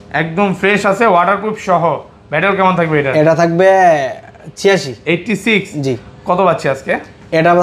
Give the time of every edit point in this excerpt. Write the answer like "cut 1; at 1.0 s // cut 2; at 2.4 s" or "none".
none